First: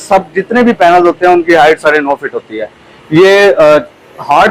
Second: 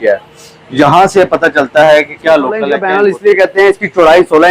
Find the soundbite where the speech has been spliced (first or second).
second